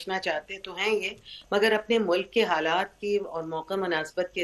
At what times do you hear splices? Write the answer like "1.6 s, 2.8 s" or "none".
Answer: none